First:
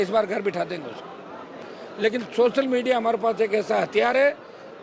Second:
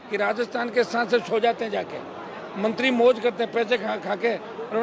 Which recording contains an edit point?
first; 1 cut; at 1.6 s

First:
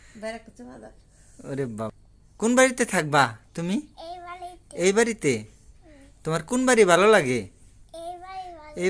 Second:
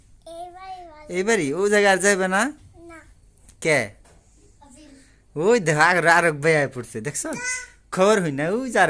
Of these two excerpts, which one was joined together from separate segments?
first; 1 cut; at 1.9 s

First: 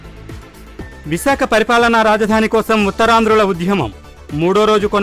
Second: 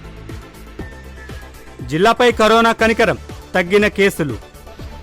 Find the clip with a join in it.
second; 1 cut; at 1.0 s

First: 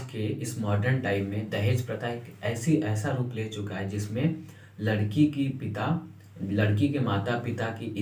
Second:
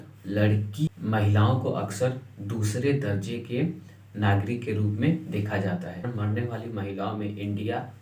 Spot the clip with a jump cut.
second; 2 cuts; at 0.9 s, 6.1 s

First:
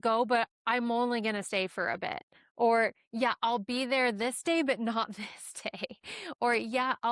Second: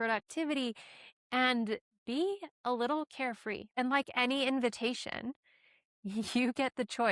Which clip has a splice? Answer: second; 1 cut; at 3.7 s

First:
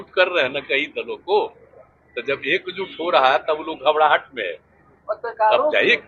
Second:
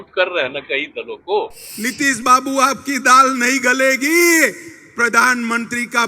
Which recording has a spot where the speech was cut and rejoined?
second; 1 cut; at 1.6 s

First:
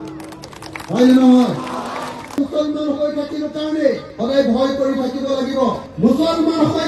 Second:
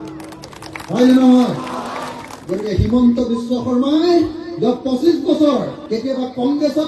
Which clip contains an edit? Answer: first; 1 cut; at 2.4 s

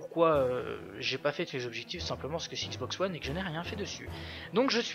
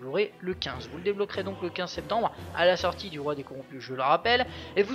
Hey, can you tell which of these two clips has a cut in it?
first; 1 cut; at 2.2 s

